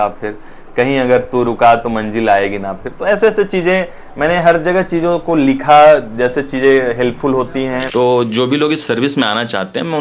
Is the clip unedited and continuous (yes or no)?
no